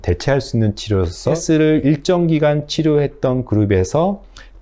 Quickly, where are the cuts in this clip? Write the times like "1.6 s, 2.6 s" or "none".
1.4 s